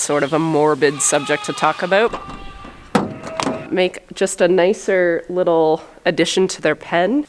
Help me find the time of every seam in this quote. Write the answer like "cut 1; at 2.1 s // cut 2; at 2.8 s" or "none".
cut 1; at 2.1 s // cut 2; at 3.7 s